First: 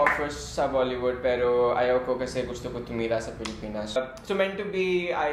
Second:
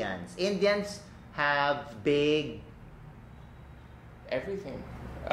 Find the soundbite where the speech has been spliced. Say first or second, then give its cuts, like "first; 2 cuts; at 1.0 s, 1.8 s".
first; 1 cut; at 4.0 s